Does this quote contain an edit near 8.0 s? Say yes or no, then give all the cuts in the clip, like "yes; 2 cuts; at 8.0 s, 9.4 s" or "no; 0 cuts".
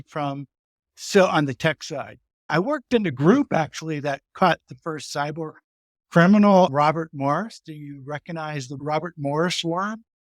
no; 1 cut; at 2.5 s